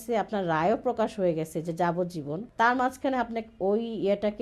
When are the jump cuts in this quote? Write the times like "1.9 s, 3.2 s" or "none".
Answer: 2.4 s